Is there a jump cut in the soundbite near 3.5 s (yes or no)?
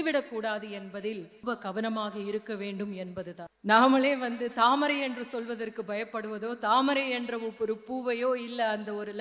yes